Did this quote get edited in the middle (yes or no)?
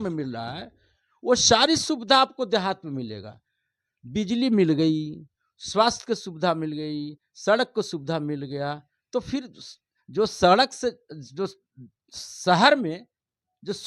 no